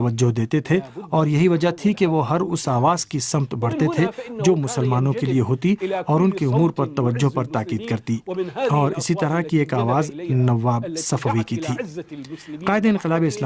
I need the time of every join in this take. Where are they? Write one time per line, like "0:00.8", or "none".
0:12.3